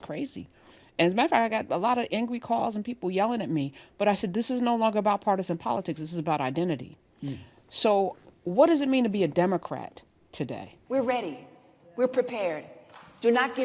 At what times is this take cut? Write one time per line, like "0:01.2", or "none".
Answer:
0:10.8